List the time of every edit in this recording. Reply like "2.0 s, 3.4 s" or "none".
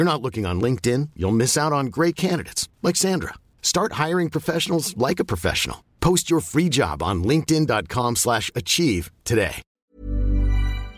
9.8 s